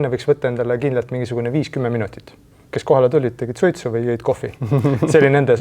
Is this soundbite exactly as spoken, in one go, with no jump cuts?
no; 1 cut; at 2.6 s

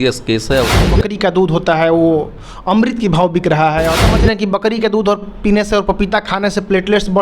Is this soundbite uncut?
no; 2 cuts; at 0.9 s, 4.1 s

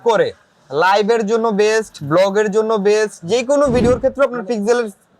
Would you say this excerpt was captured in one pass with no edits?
no; 1 cut; at 3.8 s

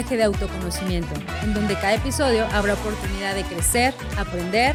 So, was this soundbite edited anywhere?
no; 0 cuts

